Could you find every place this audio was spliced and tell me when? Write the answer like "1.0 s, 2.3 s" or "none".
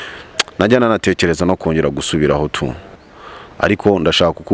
3.0 s